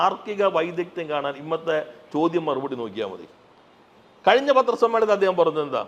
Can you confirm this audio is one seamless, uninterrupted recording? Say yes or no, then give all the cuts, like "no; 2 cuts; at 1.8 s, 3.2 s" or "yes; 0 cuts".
yes; 0 cuts